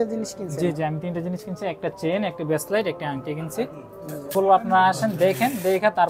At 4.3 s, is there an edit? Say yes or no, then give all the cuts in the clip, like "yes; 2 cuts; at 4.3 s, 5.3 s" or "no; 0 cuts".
yes; 1 cut; at 4.3 s